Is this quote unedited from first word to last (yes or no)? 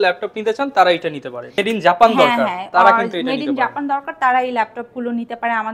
no